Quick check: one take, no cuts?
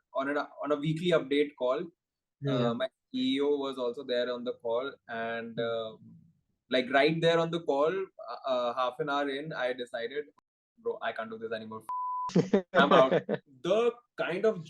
no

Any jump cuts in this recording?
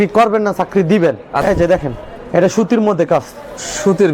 yes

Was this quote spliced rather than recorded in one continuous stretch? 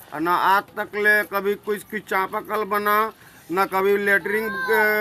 no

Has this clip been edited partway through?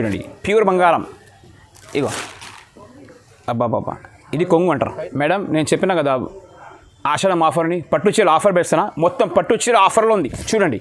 no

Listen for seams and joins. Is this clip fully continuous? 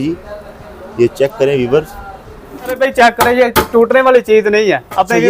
no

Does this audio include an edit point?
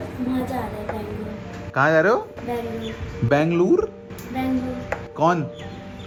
no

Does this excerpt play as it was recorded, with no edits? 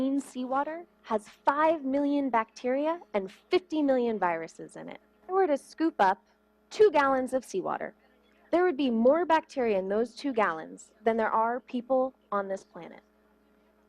no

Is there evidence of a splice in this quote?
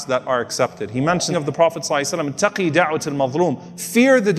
yes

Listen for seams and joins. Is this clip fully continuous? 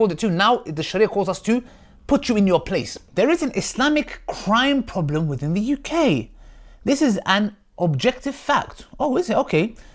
no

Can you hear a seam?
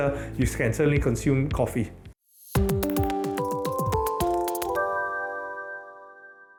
no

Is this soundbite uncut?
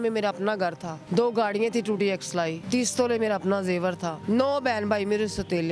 no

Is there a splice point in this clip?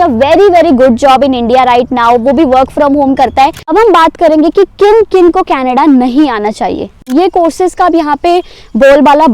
yes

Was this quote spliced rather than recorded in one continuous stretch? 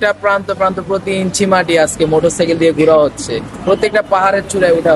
no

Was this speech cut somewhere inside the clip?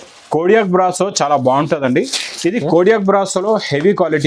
no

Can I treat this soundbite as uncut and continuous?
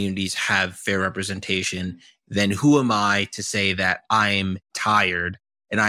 yes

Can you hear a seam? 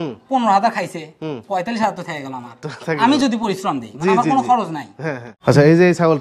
yes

